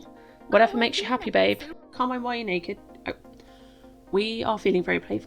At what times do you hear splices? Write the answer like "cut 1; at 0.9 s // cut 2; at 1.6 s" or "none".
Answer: cut 1; at 1.7 s